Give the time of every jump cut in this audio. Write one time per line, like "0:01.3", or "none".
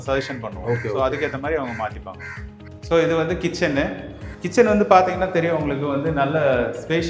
none